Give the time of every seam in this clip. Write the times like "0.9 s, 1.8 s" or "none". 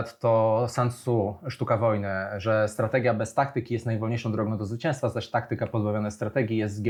none